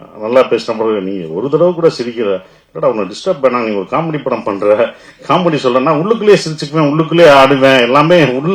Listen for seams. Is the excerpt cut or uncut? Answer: uncut